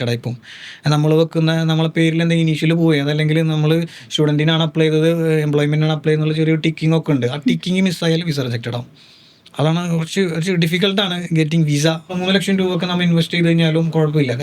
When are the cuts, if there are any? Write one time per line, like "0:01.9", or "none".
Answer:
0:12.1